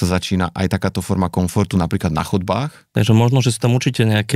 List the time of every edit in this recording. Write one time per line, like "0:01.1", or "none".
0:02.8

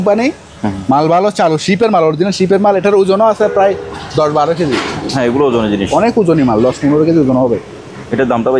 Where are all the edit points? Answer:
none

